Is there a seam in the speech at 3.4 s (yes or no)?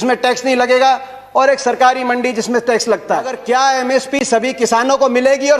yes